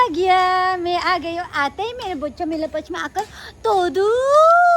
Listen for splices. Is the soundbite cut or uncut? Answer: uncut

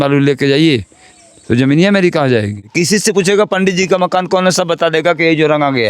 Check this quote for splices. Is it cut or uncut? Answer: cut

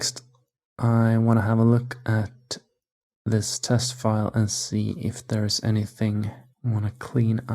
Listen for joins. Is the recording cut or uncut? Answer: cut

